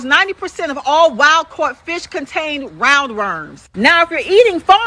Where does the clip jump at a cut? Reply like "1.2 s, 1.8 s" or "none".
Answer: 4.0 s